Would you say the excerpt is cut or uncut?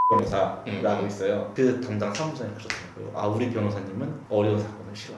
cut